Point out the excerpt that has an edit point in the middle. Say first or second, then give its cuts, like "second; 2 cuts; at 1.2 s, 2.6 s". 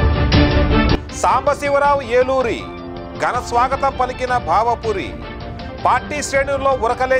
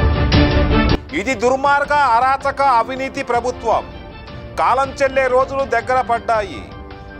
first; 1 cut; at 0.9 s